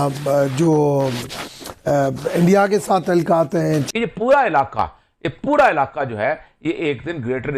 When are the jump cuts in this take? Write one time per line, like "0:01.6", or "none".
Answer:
0:03.9